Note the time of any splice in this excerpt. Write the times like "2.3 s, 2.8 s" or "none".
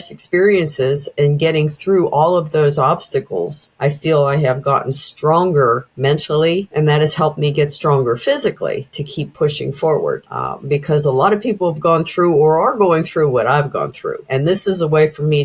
10.2 s, 14.2 s